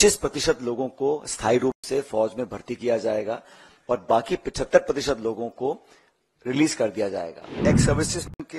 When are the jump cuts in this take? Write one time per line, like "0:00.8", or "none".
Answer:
0:07.6